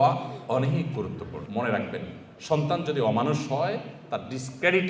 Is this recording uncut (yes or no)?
no